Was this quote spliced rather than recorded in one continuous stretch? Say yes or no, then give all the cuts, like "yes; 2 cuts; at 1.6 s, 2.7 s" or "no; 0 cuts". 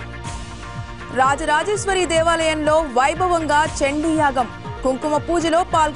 yes; 1 cut; at 1.0 s